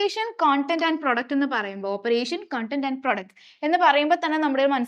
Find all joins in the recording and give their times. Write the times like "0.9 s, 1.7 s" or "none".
none